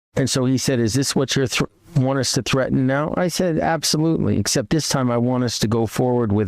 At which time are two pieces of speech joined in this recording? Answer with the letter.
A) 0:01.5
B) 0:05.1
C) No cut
C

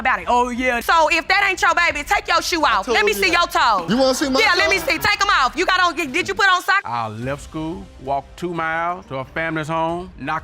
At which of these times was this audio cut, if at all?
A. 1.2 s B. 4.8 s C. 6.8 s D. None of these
C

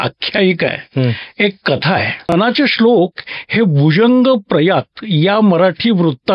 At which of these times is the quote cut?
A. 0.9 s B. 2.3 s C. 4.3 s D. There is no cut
B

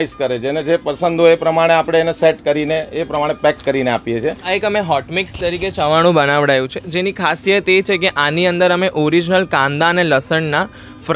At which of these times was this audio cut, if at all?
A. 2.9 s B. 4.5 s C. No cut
B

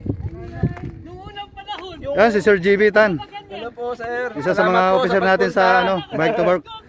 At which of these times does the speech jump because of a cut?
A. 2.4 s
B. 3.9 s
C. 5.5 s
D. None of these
D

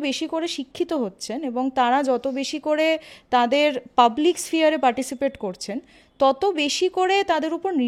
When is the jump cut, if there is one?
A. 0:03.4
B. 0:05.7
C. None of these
C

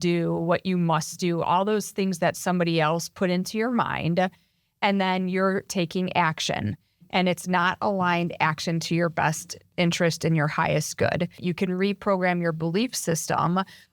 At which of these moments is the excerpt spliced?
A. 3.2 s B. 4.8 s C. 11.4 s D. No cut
C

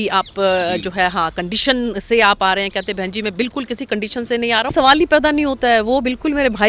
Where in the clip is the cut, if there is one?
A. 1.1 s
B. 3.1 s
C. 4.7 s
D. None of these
C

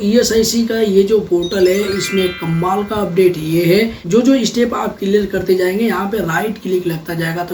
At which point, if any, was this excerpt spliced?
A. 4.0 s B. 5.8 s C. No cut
A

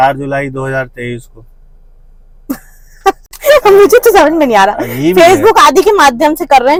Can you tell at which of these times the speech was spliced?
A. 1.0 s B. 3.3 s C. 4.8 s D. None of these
D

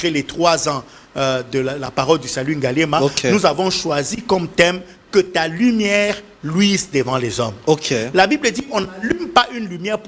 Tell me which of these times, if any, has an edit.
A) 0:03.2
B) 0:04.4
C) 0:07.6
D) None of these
D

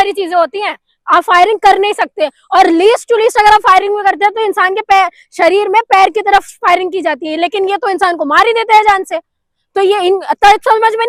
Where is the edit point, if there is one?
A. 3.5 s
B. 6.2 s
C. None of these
C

